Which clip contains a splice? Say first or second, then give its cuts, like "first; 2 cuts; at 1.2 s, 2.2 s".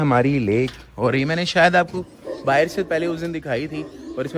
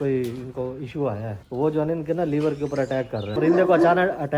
second; 2 cuts; at 1.4 s, 3.4 s